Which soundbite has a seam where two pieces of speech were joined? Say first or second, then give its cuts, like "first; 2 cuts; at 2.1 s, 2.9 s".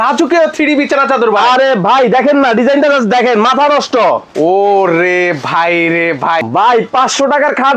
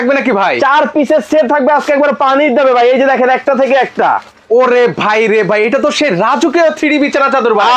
first; 1 cut; at 6.4 s